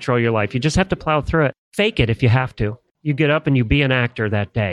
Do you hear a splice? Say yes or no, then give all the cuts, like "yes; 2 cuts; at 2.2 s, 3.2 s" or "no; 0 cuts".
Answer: yes; 2 cuts; at 1.6 s, 2.9 s